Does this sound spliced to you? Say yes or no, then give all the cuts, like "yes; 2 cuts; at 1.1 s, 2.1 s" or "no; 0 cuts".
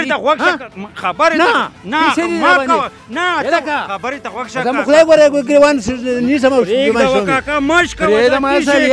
no; 0 cuts